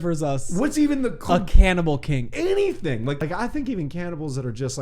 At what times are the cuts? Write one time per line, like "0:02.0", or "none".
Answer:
0:03.2

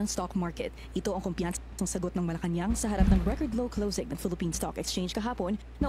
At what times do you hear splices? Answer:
none

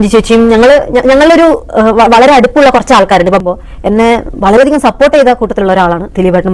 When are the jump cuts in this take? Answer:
0:03.4

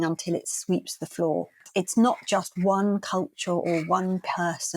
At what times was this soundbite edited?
0:01.6

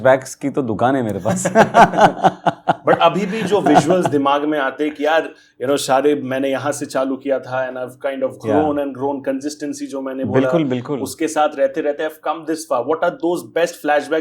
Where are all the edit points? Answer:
none

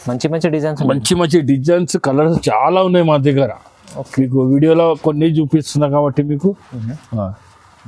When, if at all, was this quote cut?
none

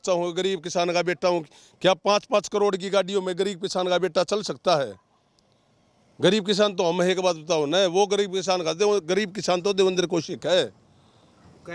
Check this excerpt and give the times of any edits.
none

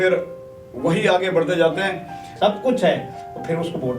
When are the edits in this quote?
0:02.3

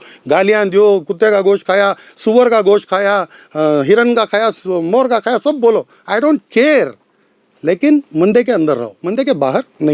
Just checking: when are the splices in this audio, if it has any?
none

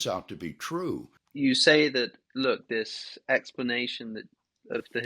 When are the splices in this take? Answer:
0:01.2

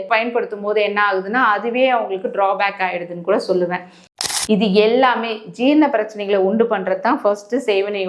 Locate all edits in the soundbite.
0:04.1

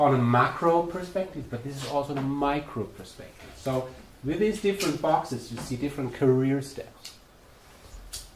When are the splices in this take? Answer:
0:05.2

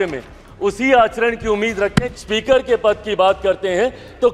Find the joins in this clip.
0:01.9

